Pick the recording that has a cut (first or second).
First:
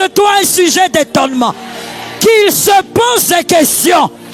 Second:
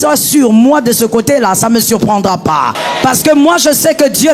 second